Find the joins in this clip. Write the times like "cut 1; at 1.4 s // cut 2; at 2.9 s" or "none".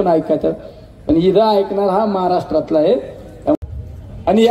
cut 1; at 3.6 s

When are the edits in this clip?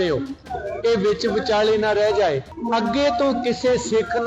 cut 1; at 2.5 s

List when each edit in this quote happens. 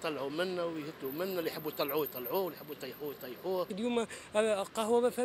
cut 1; at 3.7 s

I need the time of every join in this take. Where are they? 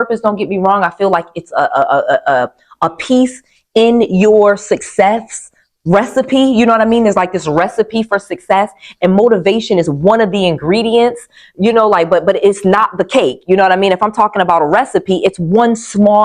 none

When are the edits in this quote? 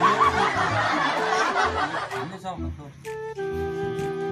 none

